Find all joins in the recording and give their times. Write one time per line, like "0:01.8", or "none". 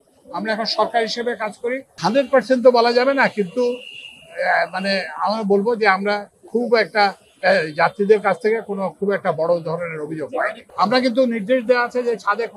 0:01.9
0:10.6